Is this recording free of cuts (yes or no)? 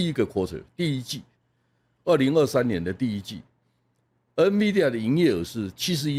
yes